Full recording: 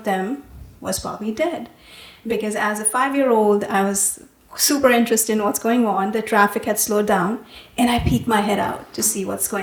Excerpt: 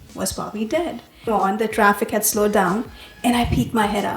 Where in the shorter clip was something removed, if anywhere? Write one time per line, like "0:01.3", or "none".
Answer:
0:01.3